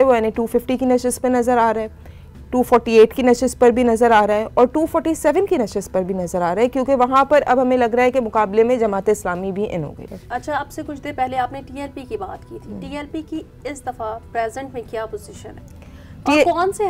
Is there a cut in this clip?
no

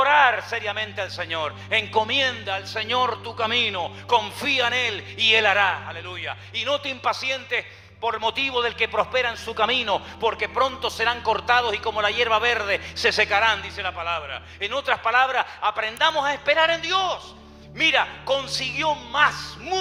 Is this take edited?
no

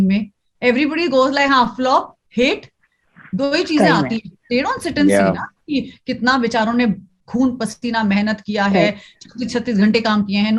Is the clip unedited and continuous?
yes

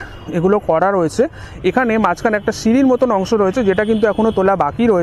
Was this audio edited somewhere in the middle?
yes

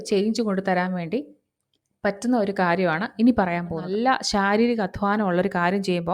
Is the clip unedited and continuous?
no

